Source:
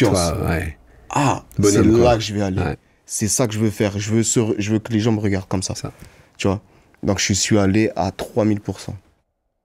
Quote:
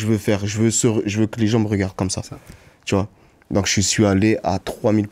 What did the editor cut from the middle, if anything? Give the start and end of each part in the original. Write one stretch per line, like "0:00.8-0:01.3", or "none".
none